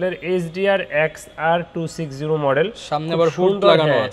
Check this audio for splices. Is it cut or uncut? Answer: uncut